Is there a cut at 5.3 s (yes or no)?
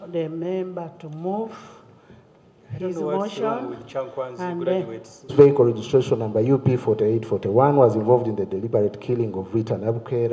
yes